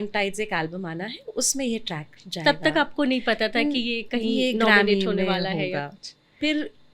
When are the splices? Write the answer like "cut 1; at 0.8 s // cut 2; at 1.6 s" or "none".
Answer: none